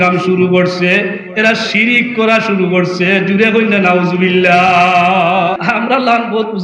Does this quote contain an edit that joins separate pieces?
yes; 1 cut; at 5.6 s

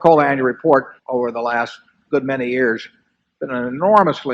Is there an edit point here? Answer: yes; 1 cut; at 1.0 s

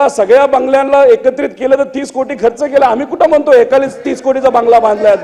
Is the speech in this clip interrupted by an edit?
no; 0 cuts

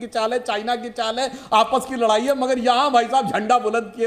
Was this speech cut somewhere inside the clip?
no; 0 cuts

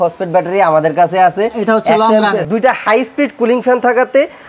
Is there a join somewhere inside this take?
yes; 1 cut; at 2.4 s

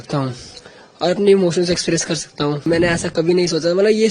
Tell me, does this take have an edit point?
yes; 1 cut; at 2.7 s

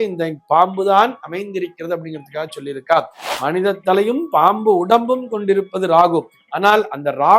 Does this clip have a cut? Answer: yes; 1 cut; at 3.2 s

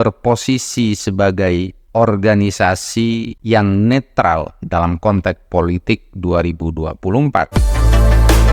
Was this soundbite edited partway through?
yes; 1 cut; at 7.5 s

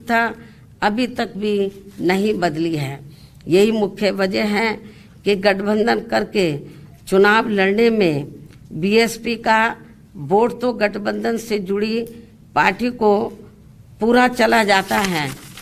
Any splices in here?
no; 0 cuts

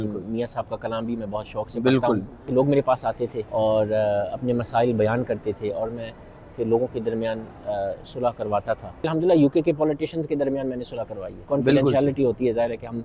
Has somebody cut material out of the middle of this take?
yes; 4 cuts; at 2.4 s, 3.4 s, 9.1 s, 11.4 s

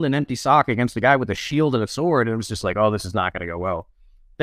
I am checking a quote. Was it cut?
no; 0 cuts

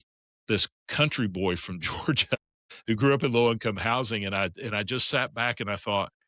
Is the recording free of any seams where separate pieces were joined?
yes; 0 cuts

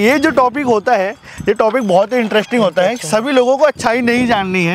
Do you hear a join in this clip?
no; 0 cuts

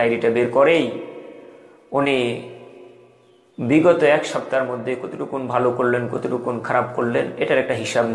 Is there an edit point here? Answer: no; 0 cuts

